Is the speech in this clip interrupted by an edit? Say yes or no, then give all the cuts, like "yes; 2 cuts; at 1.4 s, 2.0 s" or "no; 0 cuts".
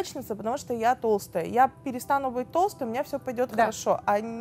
no; 0 cuts